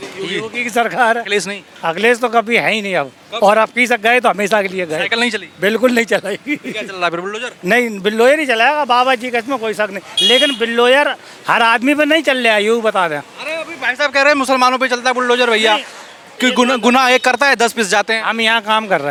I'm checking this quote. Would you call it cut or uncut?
uncut